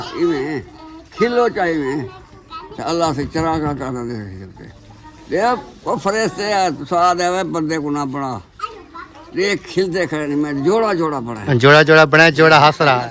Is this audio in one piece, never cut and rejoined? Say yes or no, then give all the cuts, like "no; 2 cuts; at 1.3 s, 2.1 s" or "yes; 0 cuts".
yes; 0 cuts